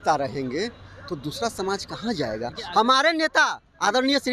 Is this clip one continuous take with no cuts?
yes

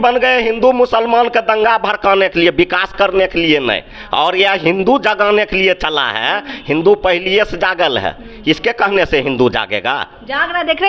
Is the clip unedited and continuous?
yes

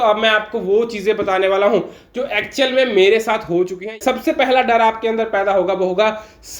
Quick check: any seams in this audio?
yes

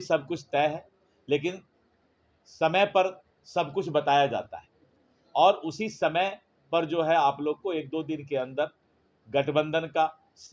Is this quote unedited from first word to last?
yes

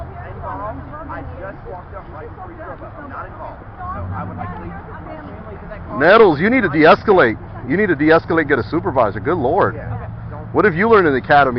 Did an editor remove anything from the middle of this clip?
no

